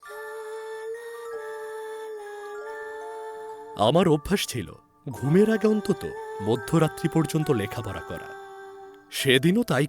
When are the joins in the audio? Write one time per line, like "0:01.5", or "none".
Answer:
0:03.7